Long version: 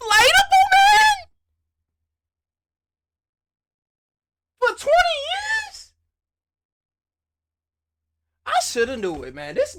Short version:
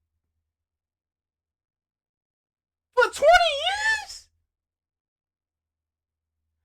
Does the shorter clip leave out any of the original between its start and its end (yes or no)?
no